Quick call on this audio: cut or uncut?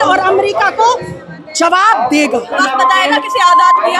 cut